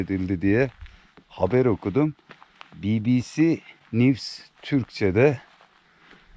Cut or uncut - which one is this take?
cut